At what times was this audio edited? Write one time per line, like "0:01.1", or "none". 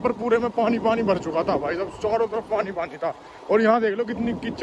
none